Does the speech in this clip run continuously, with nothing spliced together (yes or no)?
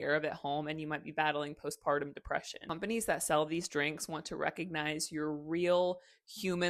yes